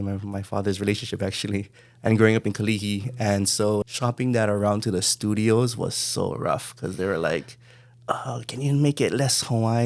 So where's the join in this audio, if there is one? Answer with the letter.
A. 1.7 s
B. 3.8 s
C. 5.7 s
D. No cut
B